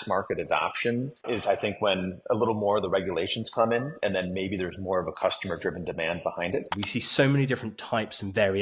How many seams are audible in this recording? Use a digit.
2